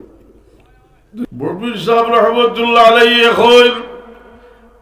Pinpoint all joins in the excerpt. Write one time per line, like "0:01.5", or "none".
0:01.3